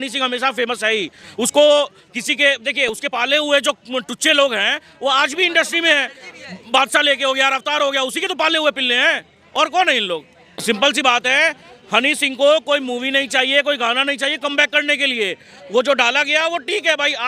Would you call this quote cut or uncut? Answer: uncut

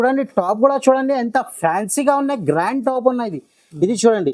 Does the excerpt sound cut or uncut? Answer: uncut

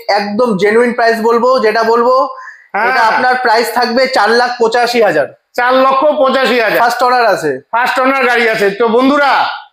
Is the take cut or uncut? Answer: uncut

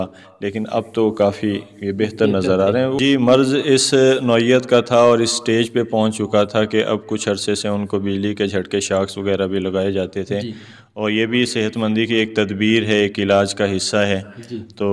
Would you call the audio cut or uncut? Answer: cut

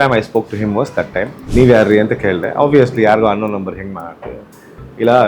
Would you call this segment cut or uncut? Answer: cut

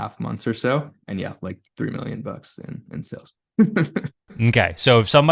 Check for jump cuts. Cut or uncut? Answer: cut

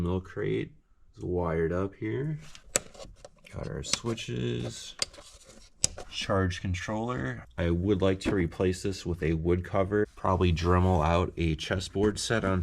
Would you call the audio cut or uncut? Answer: cut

